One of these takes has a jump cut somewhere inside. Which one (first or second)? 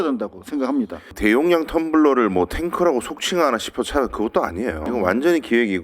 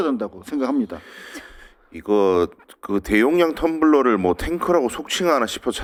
first